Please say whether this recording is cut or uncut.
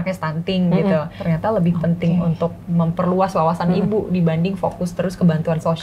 cut